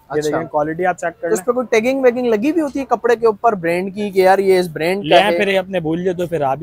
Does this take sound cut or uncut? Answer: uncut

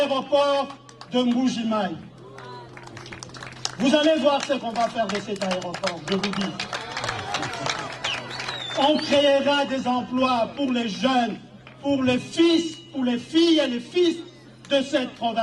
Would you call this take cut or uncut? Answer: uncut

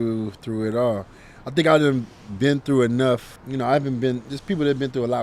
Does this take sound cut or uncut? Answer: cut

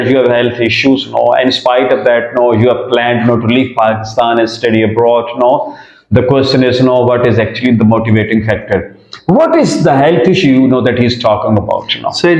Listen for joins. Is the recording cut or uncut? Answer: uncut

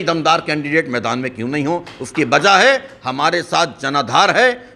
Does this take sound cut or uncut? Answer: uncut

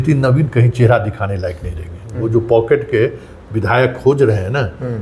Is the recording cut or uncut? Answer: uncut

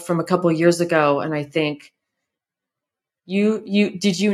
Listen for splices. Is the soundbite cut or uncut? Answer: uncut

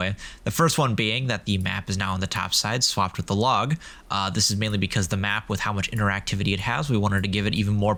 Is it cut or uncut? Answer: uncut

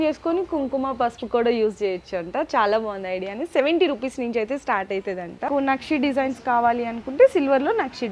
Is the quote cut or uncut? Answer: cut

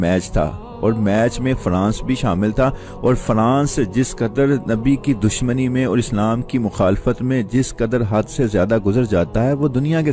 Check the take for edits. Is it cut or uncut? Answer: uncut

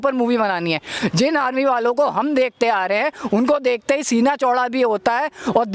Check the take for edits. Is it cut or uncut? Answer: cut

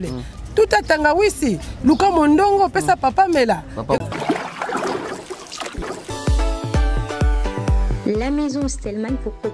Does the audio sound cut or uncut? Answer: cut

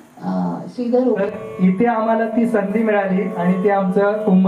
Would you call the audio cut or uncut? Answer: cut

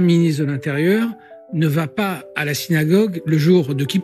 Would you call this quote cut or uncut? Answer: uncut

